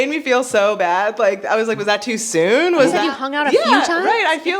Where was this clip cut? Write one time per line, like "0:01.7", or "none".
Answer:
0:03.0